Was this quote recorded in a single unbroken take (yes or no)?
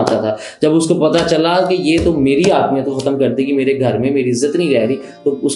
yes